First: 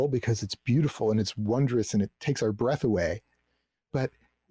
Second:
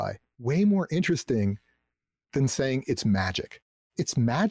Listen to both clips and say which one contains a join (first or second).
second